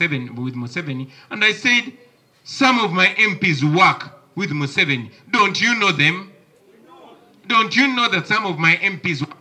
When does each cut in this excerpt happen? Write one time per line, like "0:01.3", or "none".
none